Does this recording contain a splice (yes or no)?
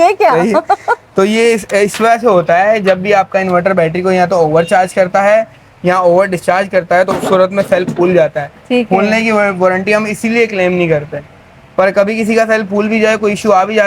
no